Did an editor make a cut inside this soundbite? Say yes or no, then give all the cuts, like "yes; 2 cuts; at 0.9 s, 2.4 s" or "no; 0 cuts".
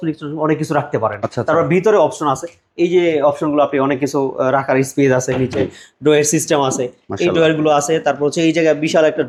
no; 0 cuts